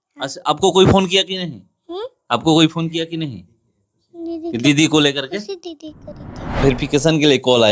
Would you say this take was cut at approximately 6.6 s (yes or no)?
yes